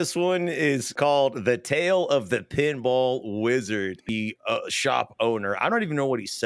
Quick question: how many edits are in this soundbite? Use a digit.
2